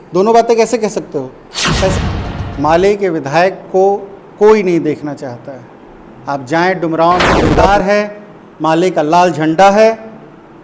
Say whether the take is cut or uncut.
cut